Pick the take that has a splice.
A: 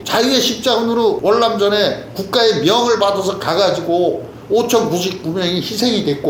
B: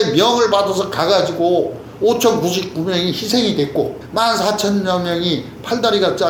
A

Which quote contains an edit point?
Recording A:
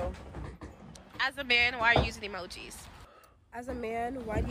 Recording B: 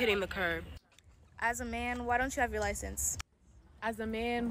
A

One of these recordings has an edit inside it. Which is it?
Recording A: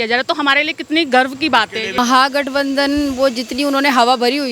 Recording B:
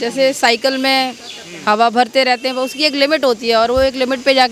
A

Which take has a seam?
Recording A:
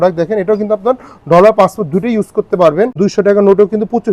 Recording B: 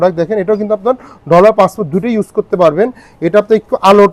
A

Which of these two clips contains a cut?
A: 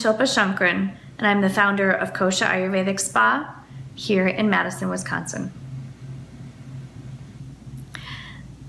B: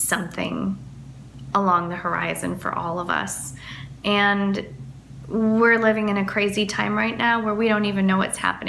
A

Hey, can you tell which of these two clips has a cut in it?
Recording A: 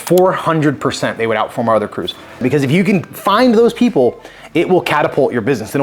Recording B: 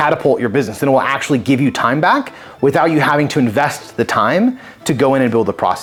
A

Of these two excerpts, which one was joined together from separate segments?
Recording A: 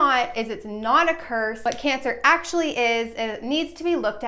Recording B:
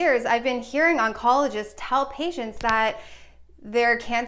A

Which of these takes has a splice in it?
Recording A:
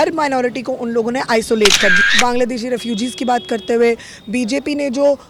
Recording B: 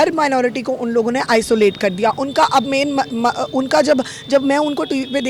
A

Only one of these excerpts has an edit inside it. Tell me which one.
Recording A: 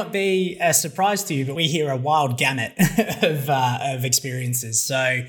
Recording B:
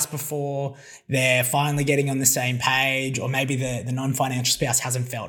A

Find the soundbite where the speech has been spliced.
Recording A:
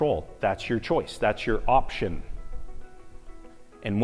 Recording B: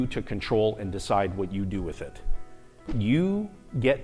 B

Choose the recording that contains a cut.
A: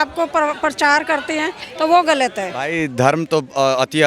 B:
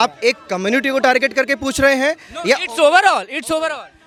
A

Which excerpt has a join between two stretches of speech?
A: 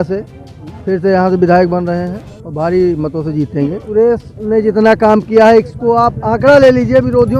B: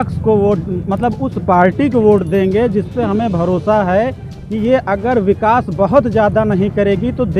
A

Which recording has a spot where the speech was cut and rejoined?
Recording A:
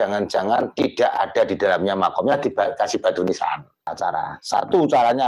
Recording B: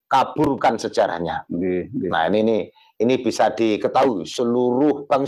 A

